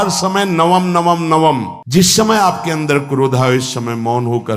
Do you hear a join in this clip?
yes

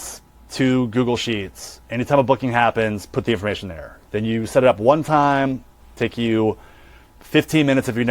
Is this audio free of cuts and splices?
no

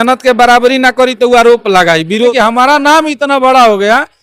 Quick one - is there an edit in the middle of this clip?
yes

